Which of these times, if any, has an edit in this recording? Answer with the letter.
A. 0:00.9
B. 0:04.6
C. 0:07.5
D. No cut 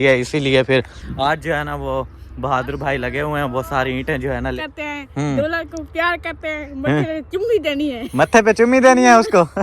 B